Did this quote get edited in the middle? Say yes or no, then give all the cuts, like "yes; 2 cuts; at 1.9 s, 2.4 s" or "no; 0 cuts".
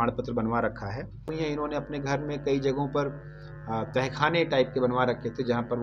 yes; 1 cut; at 1.3 s